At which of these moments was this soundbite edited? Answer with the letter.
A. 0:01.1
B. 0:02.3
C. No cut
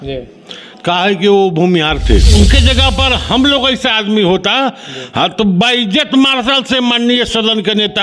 B